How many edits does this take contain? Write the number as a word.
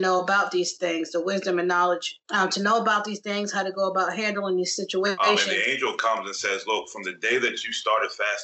two